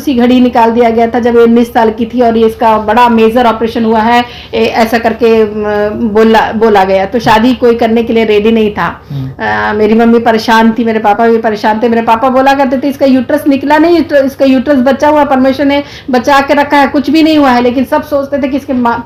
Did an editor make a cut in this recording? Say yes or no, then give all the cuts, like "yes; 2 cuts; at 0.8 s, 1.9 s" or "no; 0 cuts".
no; 0 cuts